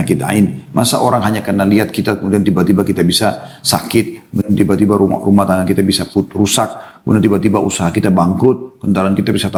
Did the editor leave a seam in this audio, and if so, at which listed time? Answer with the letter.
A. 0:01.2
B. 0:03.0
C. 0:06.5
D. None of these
D